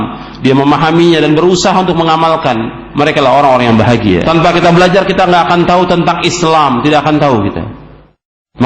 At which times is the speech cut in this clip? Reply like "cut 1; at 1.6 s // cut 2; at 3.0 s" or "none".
cut 1; at 4.2 s